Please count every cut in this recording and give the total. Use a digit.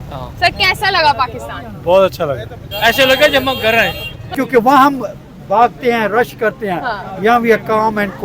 1